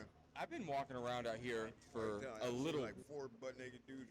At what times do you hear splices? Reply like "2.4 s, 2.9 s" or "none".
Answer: 3.0 s